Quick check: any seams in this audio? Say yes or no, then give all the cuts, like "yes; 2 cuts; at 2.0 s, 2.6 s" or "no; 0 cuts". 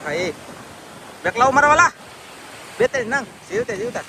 no; 0 cuts